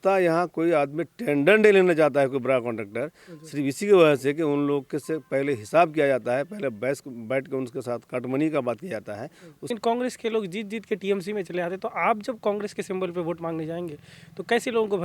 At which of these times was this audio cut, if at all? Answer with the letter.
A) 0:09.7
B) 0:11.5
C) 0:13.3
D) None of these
A